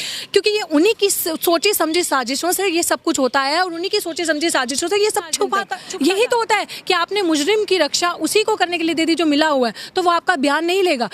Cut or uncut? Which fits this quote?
cut